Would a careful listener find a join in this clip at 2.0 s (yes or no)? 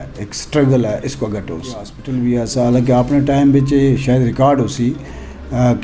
yes